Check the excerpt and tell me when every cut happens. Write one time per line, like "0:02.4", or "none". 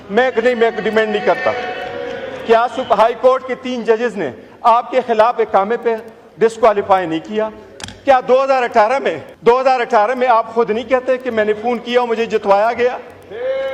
0:09.3